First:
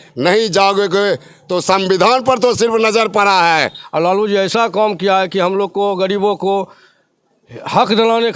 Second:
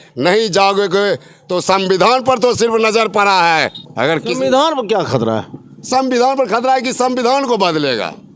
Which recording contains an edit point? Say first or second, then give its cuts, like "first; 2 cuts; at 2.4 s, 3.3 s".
first; 1 cut; at 3.8 s